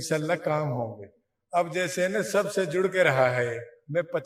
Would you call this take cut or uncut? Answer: uncut